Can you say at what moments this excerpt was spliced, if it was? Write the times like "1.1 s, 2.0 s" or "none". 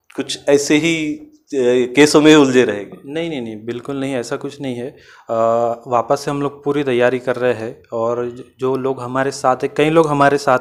none